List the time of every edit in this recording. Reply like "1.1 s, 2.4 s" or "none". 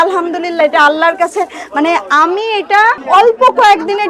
3.0 s

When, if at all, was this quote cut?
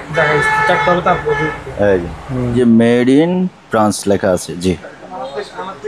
2.5 s

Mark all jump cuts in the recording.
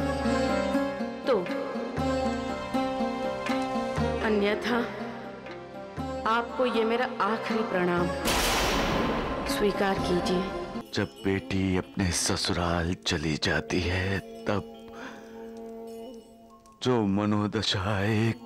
10.8 s

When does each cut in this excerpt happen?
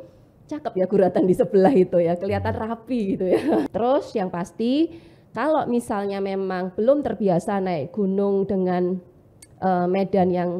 3.7 s

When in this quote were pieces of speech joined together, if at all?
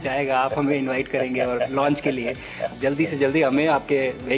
2.7 s

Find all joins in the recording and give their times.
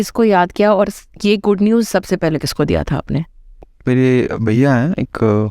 3.7 s

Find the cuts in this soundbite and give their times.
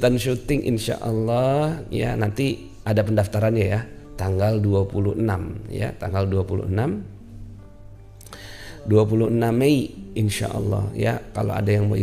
none

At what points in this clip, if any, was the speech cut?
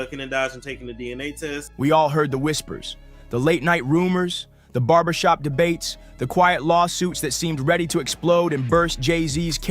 1.3 s

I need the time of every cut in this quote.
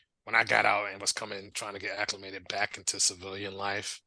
1.5 s

